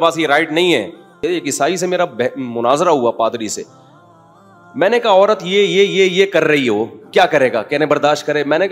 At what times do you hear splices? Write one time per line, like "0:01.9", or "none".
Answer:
0:01.2